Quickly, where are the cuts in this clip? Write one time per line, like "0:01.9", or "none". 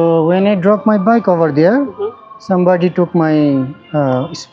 none

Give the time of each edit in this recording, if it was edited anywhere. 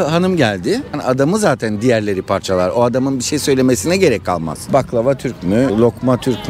0:00.9
0:04.6

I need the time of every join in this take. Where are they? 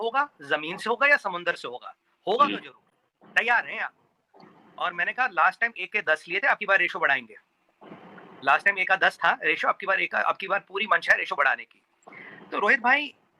none

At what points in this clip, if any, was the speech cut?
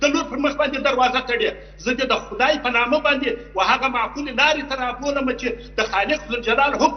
none

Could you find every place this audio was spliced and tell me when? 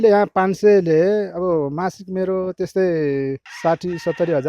none

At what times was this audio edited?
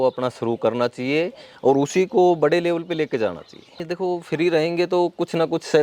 0:03.8

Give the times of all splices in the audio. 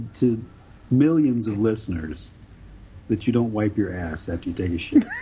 none

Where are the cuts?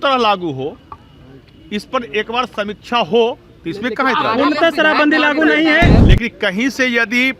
0:06.0

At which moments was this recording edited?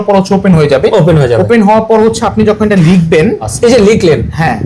0:03.5

